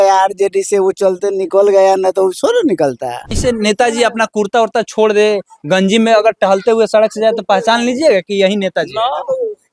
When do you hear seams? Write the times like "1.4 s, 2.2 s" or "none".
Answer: 3.4 s